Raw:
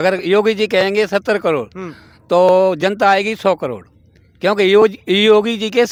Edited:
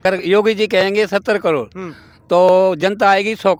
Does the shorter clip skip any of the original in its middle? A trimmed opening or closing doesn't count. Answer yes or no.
no